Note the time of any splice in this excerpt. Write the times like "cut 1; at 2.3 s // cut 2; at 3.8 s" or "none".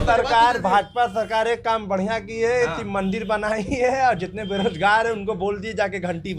none